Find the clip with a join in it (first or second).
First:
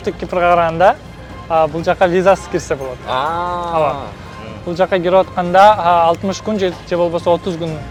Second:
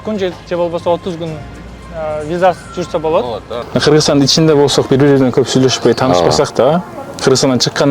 second